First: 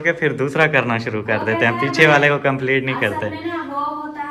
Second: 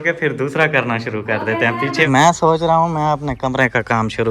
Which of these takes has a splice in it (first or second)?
second